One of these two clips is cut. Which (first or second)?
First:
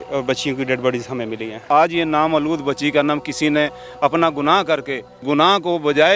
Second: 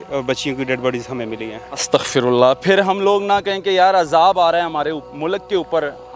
first